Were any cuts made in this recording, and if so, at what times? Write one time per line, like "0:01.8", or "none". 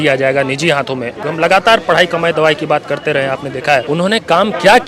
0:01.2
0:03.8